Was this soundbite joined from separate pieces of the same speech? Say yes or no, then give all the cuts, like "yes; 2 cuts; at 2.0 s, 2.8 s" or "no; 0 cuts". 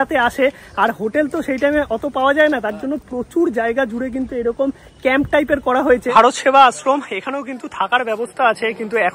yes; 1 cut; at 6.1 s